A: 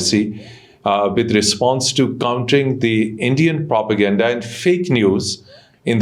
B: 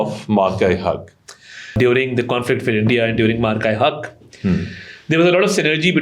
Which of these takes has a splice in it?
B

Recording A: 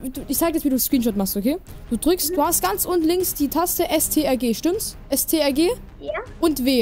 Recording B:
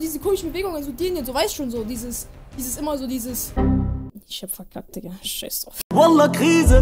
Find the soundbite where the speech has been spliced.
B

